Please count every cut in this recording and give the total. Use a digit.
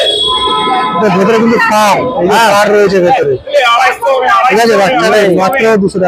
0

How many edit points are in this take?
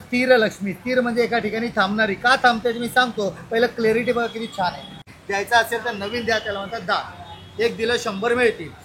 1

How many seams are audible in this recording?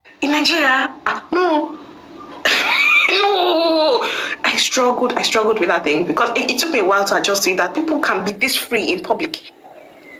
0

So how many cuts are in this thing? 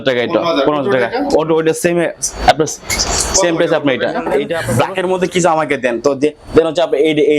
1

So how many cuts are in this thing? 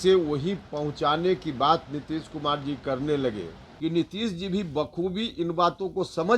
1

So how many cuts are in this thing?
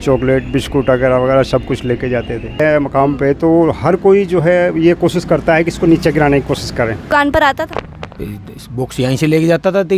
2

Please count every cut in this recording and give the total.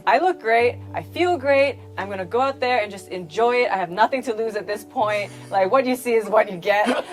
0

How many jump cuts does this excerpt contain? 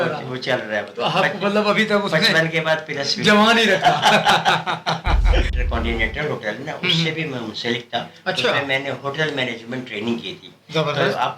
1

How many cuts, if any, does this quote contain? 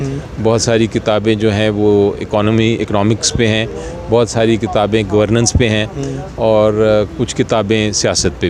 0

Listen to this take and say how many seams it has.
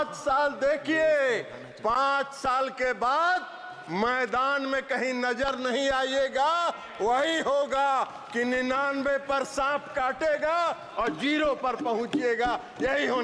0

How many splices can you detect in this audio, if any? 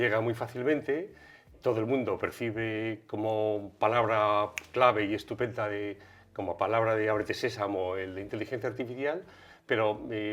0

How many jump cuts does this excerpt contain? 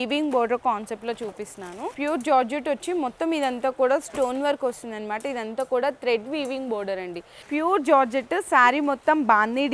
2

